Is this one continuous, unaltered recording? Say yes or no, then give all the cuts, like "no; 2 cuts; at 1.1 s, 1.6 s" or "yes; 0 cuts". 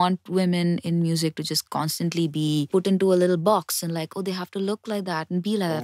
no; 1 cut; at 2.7 s